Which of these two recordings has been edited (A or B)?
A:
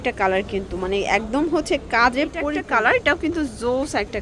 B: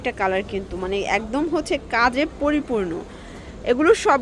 A